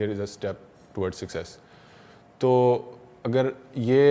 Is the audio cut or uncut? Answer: uncut